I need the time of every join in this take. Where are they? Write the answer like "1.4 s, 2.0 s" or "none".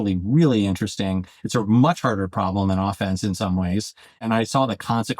4.2 s